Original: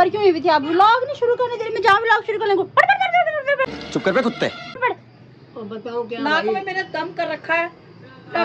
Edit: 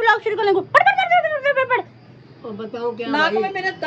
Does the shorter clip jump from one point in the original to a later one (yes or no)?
yes